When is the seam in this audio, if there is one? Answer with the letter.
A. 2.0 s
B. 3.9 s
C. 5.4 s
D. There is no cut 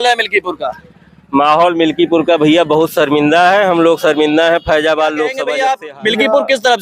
C